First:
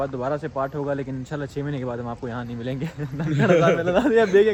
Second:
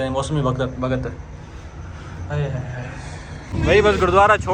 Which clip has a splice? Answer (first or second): second